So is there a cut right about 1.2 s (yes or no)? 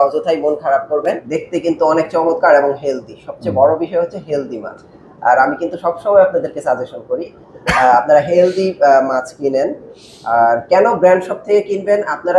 yes